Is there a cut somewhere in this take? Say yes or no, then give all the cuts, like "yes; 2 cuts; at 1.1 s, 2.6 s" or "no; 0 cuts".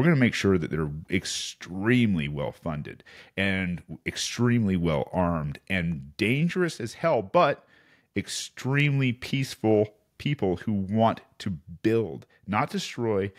no; 0 cuts